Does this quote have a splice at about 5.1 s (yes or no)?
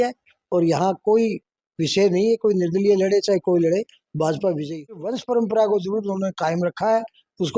yes